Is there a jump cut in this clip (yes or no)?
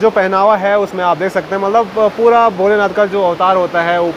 no